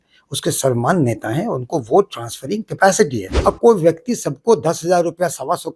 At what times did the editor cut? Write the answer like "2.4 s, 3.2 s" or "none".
3.3 s